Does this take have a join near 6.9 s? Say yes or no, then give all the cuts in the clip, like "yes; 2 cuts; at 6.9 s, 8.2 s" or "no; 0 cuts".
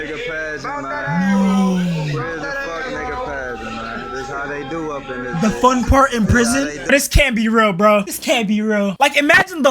yes; 1 cut; at 6.9 s